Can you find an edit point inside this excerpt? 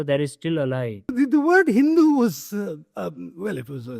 yes; 1 cut; at 1.1 s

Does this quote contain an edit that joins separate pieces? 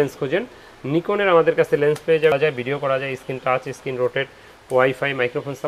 yes; 1 cut; at 2.3 s

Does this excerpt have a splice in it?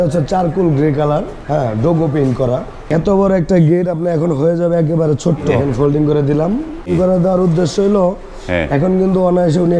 yes; 4 cuts; at 1.4 s, 2.9 s, 5.6 s, 6.9 s

